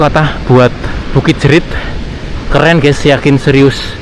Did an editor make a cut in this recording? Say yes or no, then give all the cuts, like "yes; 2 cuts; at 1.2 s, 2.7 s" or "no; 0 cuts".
yes; 1 cut; at 0.9 s